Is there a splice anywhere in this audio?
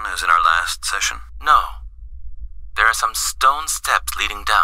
no; 0 cuts

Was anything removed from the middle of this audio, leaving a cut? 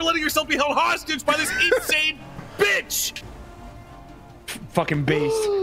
no; 0 cuts

